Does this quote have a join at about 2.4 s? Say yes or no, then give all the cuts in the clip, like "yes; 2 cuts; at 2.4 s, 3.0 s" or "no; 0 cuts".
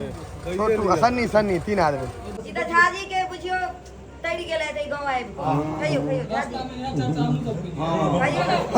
yes; 1 cut; at 2.4 s